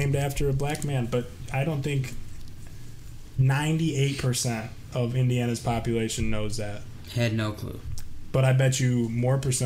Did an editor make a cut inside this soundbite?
no; 0 cuts

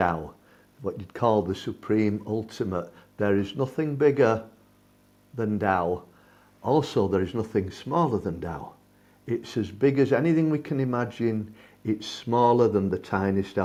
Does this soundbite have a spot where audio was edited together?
no; 0 cuts

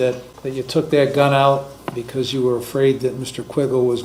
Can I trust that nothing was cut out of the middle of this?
yes; 0 cuts

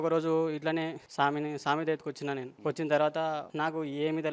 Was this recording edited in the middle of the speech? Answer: yes; 3 cuts; at 1.0 s, 2.5 s, 3.5 s

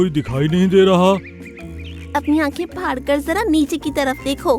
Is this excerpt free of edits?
yes; 0 cuts

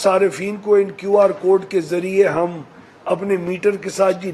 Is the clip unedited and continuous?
yes; 0 cuts

